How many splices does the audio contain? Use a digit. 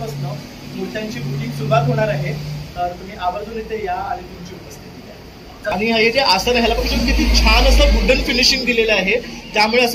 1